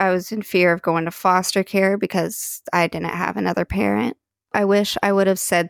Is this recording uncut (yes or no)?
no